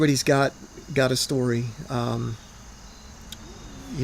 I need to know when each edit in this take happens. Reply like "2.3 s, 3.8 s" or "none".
none